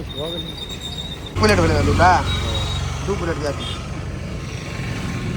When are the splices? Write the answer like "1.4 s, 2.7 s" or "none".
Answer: 1.2 s